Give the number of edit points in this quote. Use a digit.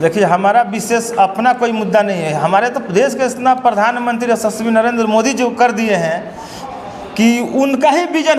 0